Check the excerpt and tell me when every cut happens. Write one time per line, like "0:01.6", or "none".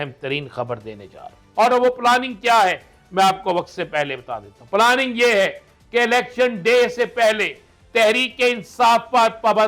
0:01.4